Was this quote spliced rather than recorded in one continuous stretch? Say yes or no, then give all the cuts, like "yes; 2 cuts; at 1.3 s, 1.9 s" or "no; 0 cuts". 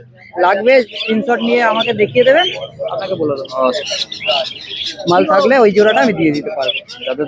no; 0 cuts